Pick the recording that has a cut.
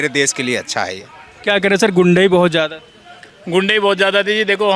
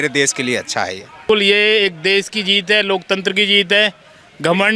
second; 1 cut; at 1.2 s

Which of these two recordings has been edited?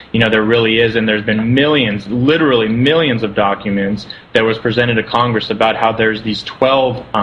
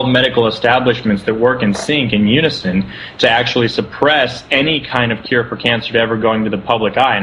second; 1 cut; at 2.7 s

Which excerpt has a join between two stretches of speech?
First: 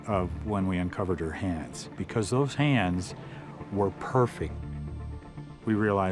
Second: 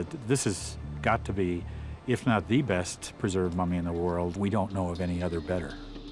first; 1 cut; at 1.9 s

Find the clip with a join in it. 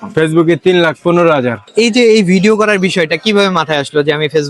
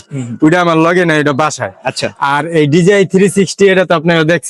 first; 1 cut; at 1.6 s

